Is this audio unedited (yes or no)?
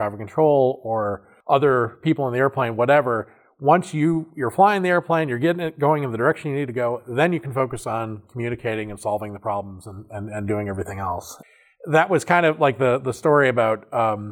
yes